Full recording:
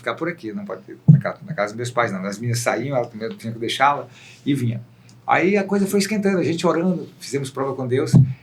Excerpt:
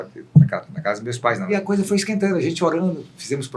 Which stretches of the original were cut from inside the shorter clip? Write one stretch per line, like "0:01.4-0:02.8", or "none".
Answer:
0:02.2-0:05.5